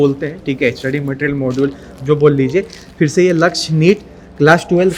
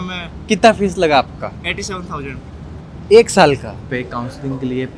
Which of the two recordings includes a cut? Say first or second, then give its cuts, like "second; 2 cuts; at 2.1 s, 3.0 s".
second; 1 cut; at 3.8 s